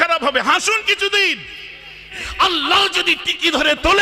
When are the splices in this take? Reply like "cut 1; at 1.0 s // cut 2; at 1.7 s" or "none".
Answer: cut 1; at 2.1 s

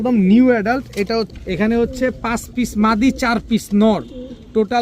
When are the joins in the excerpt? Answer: cut 1; at 1.3 s

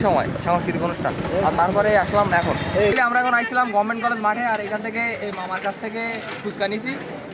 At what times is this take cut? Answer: cut 1; at 2.9 s

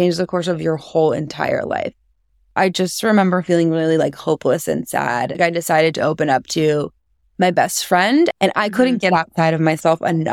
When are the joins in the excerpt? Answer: cut 1; at 2.5 s // cut 2; at 5.4 s // cut 3; at 8.3 s

